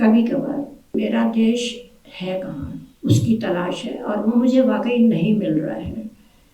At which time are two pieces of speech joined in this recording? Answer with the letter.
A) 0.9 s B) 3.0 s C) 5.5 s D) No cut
A